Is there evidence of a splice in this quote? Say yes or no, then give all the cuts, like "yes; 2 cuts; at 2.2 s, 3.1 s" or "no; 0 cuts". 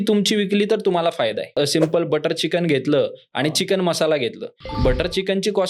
yes; 1 cut; at 1.6 s